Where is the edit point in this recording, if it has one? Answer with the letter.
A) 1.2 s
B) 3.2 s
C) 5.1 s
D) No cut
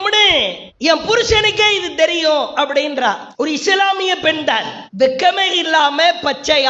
D